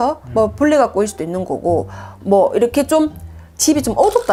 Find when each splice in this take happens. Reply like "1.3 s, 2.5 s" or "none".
none